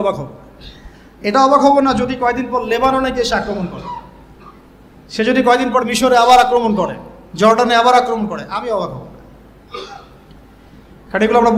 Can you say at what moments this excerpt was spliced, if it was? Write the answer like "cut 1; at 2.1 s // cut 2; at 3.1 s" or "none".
none